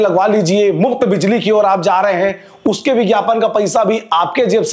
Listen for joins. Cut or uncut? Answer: uncut